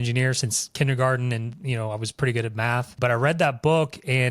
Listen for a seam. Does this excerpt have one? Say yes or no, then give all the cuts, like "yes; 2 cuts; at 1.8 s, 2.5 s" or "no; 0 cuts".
yes; 1 cut; at 2.9 s